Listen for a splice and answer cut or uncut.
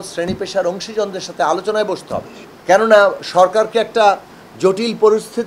cut